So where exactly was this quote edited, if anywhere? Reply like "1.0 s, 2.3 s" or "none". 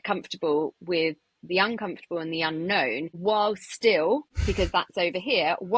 3.1 s, 4.3 s